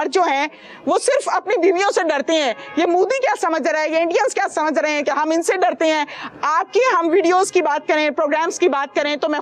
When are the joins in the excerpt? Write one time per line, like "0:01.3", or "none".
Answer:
none